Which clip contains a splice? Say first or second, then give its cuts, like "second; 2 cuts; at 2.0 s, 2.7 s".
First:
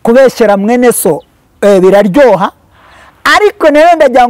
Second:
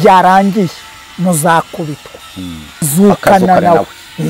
second; 1 cut; at 2.9 s